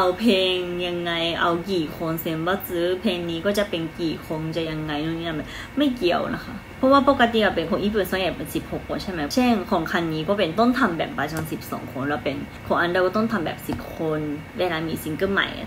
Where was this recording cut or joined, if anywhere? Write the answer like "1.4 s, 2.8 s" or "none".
none